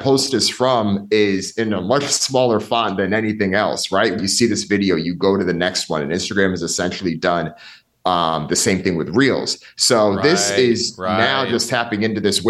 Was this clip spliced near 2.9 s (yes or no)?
no